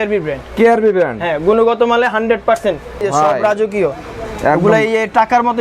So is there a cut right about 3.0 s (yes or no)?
yes